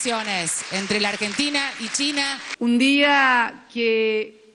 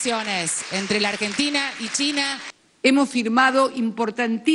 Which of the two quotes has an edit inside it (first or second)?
second